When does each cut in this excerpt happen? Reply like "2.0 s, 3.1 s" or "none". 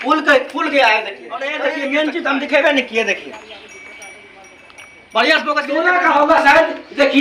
1.7 s, 5.7 s